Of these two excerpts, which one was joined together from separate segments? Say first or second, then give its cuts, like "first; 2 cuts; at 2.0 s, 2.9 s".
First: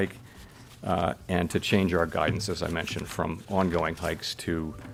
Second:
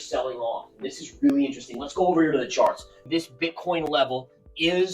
second; 1 cut; at 3.0 s